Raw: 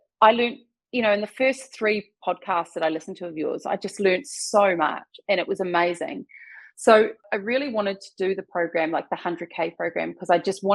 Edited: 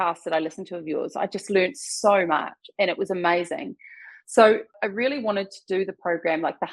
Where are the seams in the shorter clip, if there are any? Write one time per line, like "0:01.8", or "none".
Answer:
none